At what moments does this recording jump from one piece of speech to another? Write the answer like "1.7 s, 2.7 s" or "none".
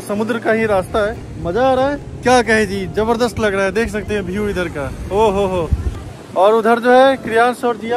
none